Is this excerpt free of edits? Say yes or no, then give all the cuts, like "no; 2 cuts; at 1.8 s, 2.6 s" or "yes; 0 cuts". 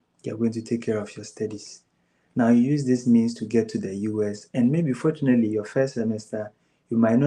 yes; 0 cuts